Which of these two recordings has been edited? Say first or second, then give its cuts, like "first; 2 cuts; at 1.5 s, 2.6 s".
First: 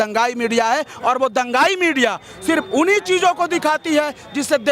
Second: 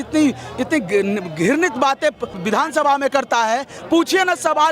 second; 2 cuts; at 2.3 s, 3.7 s